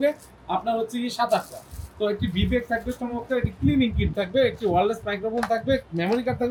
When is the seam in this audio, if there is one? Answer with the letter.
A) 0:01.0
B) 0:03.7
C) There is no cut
C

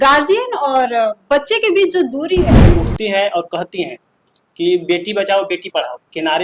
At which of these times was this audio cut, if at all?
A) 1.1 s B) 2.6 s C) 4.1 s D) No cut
B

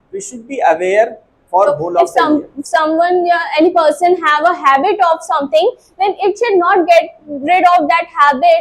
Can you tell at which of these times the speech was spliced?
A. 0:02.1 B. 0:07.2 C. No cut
A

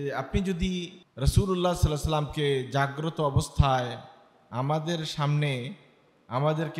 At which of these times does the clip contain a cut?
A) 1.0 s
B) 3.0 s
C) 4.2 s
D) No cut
A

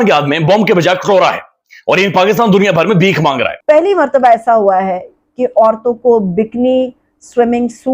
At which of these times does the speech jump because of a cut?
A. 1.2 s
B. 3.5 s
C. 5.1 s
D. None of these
B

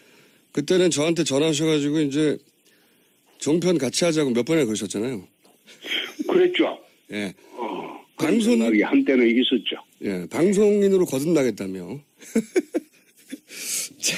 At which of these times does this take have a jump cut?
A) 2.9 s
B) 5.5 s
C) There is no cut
C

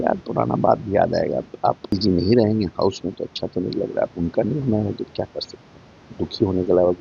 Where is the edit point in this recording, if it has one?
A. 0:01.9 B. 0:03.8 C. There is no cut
A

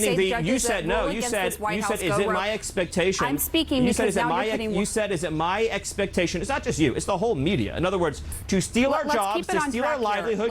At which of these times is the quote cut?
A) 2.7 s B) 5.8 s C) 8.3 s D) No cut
C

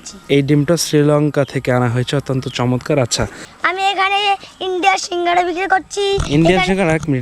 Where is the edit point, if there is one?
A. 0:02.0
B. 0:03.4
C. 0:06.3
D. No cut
B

